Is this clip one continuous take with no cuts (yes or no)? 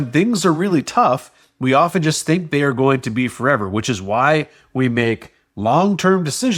yes